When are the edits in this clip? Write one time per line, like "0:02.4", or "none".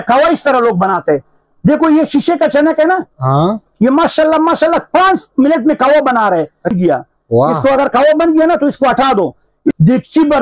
0:06.7
0:09.7